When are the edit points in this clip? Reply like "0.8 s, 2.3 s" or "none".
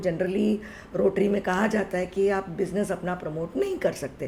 none